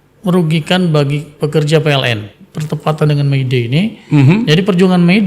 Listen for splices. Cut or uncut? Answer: cut